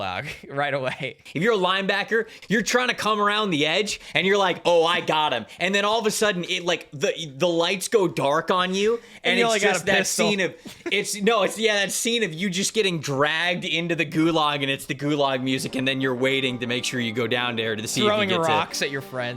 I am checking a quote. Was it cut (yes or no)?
yes